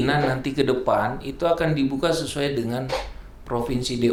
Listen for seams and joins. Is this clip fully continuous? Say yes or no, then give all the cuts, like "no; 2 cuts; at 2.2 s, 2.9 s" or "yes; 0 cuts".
yes; 0 cuts